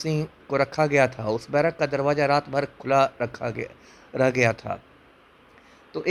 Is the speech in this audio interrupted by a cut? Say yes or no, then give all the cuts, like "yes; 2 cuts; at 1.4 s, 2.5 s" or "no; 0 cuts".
no; 0 cuts